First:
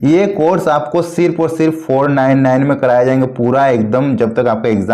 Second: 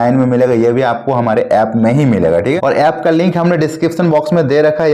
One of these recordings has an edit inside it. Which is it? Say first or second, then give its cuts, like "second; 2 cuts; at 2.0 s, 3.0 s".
second; 1 cut; at 2.6 s